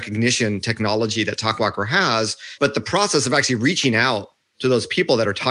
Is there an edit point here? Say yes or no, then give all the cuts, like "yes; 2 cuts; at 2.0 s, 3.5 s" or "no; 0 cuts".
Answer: yes; 1 cut; at 2.4 s